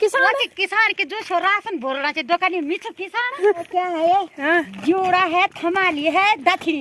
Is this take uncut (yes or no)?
no